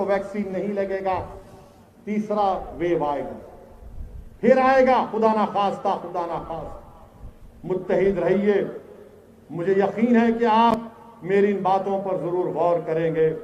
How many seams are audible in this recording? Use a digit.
0